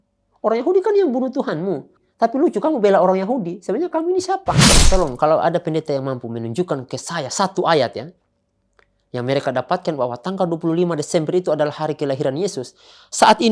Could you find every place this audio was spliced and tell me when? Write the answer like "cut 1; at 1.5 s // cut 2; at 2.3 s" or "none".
cut 1; at 2.0 s // cut 2; at 4.7 s